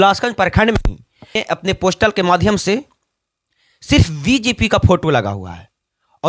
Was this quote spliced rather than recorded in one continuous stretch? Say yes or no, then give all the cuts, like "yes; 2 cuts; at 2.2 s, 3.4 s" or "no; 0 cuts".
yes; 1 cut; at 1.4 s